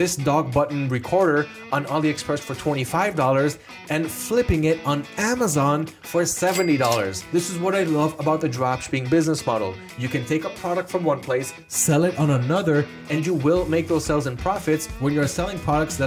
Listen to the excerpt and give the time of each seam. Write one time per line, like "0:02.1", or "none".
none